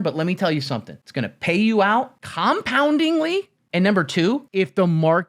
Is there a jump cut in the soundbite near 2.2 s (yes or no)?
yes